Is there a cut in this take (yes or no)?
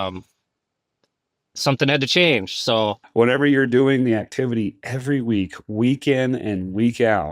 yes